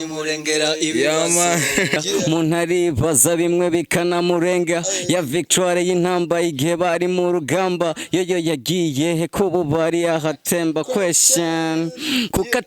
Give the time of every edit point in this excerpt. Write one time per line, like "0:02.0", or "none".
0:02.0